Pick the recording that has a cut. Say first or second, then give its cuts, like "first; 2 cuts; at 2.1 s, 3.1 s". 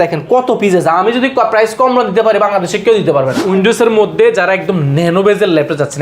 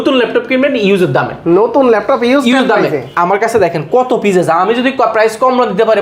first; 1 cut; at 3.4 s